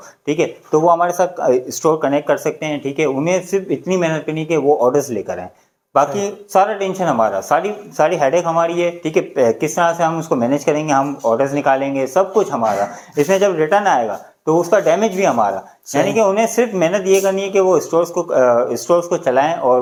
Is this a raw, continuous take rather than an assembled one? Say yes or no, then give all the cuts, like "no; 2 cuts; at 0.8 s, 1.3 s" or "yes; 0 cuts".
yes; 0 cuts